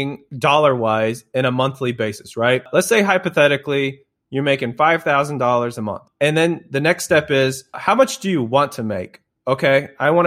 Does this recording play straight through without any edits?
no; 3 cuts; at 2.7 s, 6.0 s, 7.8 s

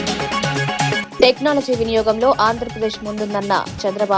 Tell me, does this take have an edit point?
yes; 1 cut; at 1.1 s

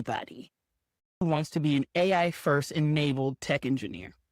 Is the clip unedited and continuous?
no; 1 cut; at 1.0 s

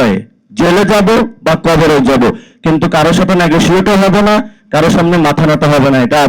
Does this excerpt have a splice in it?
no; 0 cuts

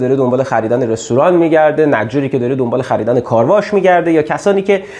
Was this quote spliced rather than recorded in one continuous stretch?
no; 0 cuts

